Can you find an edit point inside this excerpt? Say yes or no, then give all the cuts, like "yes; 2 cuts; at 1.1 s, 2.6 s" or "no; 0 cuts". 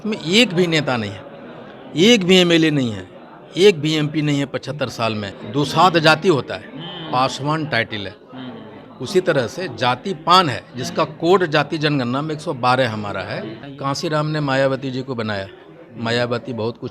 yes; 2 cuts; at 5.4 s, 13.6 s